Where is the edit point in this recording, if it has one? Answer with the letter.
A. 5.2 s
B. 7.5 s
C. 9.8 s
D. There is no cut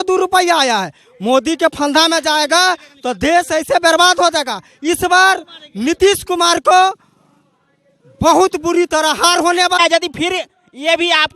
C